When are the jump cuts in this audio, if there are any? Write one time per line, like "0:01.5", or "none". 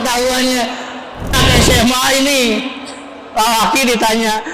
0:01.4